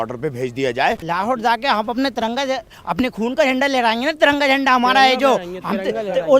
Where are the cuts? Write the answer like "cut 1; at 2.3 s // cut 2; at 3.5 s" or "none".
cut 1; at 1.0 s